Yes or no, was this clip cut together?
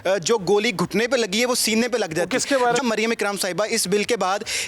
yes